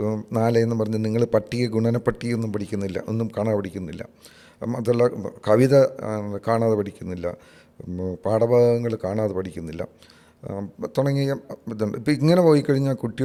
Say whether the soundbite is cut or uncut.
uncut